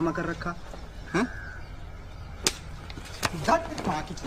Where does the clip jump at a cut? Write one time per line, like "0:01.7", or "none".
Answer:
none